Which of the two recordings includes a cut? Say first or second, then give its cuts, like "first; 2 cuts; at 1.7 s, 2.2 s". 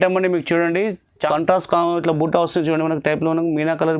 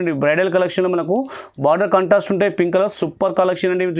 first; 1 cut; at 1.3 s